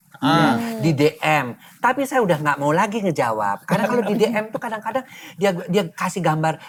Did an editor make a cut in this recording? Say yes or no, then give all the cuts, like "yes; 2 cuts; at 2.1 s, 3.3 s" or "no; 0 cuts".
no; 0 cuts